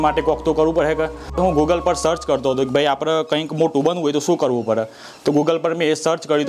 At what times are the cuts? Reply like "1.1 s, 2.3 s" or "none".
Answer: 1.4 s